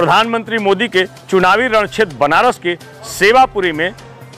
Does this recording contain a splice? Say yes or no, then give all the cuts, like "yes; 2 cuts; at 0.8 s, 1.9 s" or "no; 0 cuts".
no; 0 cuts